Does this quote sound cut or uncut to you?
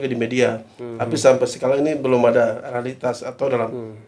uncut